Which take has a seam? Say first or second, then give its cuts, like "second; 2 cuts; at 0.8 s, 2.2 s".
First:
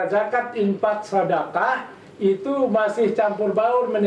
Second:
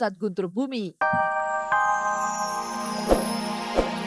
second; 1 cut; at 0.9 s